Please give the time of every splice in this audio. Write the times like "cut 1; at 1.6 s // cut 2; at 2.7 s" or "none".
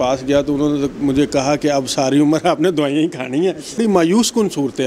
cut 1; at 3.8 s

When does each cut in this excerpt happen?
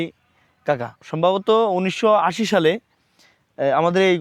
cut 1; at 1.0 s

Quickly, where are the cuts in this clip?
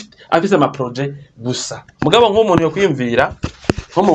cut 1; at 1.8 s

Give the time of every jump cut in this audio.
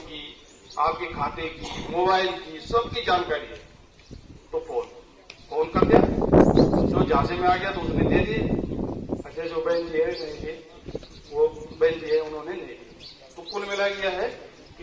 none

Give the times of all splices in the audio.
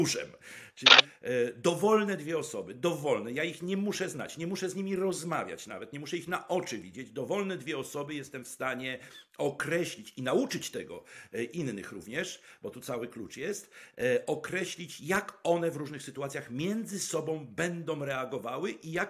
cut 1; at 1.0 s

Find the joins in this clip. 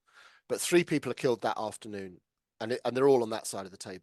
none

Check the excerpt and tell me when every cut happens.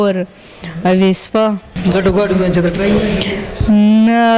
cut 1; at 1.8 s

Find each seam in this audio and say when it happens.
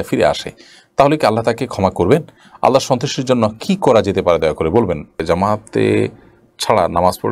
cut 1; at 5.2 s

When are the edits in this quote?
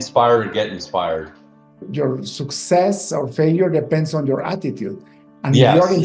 cut 1; at 1.8 s

